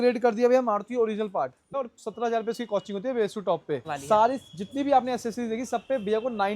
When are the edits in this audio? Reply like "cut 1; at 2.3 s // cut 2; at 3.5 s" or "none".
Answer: cut 1; at 1.7 s // cut 2; at 3.9 s